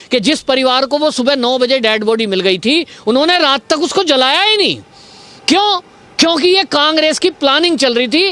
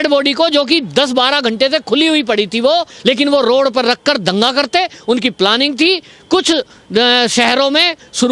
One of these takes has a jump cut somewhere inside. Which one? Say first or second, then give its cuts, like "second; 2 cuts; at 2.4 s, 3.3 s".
second; 1 cut; at 2.9 s